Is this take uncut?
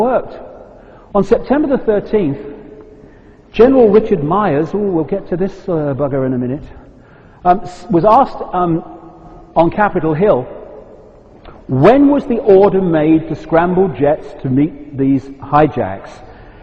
yes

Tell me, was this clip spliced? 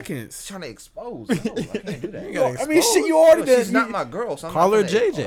no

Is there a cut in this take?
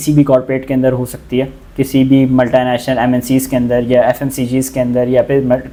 no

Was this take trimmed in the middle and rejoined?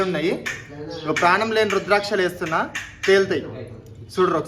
no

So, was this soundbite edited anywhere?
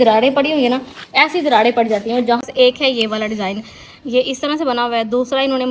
yes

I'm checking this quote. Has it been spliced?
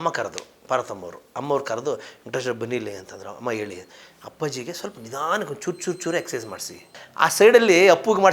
yes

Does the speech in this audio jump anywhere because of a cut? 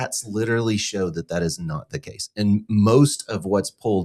no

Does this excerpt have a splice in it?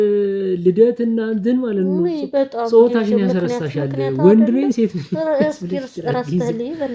no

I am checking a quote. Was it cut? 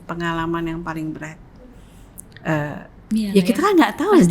no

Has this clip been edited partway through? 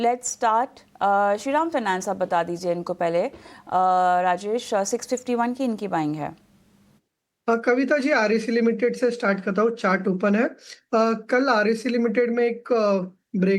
yes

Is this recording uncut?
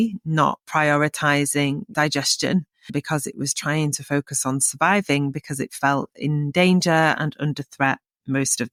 yes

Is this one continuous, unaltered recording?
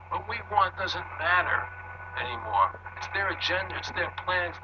yes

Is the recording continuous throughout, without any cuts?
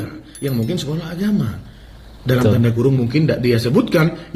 yes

